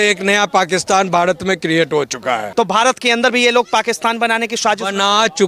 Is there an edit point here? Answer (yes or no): yes